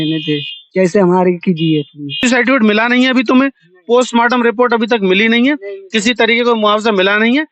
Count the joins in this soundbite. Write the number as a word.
one